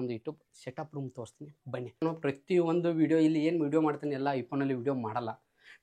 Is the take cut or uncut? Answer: cut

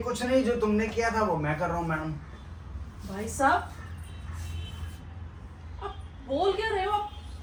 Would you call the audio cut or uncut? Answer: uncut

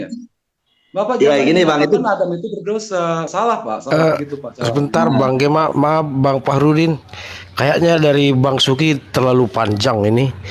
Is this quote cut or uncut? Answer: uncut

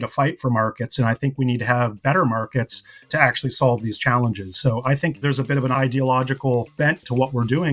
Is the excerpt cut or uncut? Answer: uncut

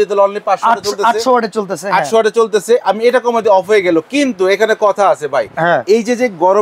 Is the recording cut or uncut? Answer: uncut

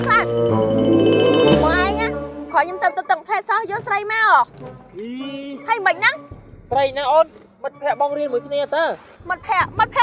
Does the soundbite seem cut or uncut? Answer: uncut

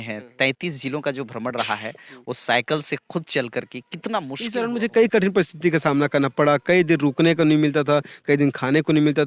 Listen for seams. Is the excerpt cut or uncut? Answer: cut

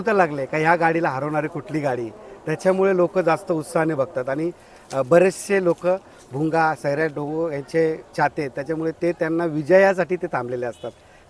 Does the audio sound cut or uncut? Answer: uncut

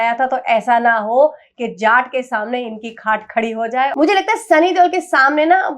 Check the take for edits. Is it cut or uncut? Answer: cut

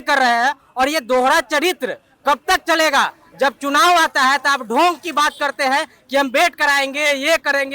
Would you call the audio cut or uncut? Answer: uncut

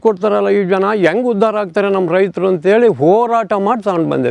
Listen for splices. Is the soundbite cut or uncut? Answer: uncut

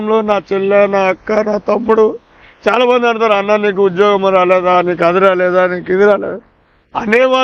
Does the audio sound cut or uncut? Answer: uncut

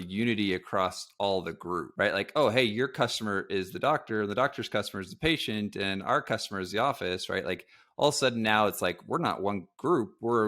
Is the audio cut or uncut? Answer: cut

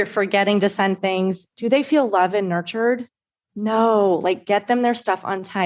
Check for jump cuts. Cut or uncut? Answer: uncut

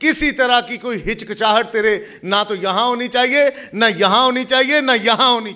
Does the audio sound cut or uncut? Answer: uncut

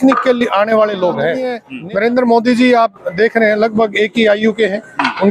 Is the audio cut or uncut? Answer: cut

